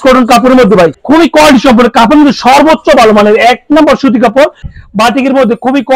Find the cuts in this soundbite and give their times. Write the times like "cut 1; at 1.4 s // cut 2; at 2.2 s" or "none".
cut 1; at 1.0 s // cut 2; at 4.7 s